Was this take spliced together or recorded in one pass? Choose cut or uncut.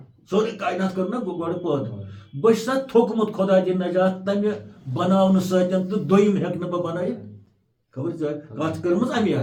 uncut